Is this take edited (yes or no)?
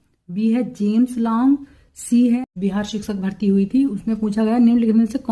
yes